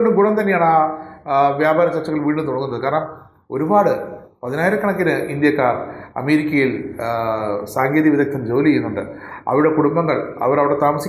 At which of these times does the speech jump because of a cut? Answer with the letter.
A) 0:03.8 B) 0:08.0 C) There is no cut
C